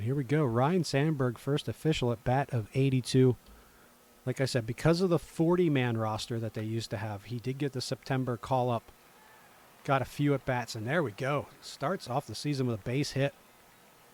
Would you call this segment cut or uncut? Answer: uncut